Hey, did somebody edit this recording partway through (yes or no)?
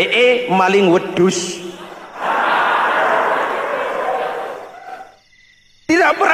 no